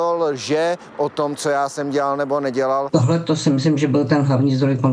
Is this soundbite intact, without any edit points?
no; 1 cut; at 2.9 s

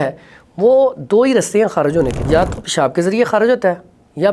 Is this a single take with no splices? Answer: no; 1 cut; at 2.2 s

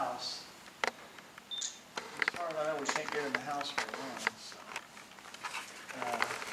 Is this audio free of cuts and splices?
yes; 0 cuts

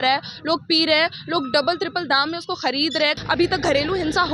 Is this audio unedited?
no; 1 cut; at 3.1 s

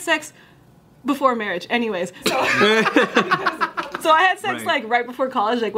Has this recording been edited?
yes; 1 cut; at 2.2 s

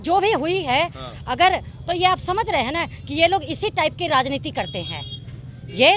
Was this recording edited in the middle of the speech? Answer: no; 0 cuts

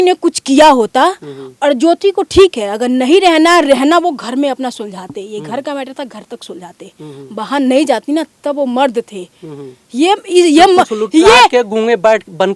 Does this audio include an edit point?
no; 0 cuts

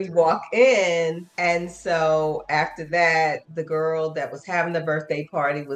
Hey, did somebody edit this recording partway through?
no; 0 cuts

